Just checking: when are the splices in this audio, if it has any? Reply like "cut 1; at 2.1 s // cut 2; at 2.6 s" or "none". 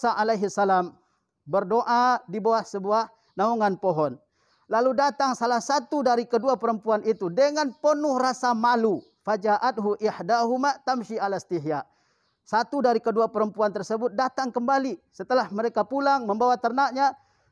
none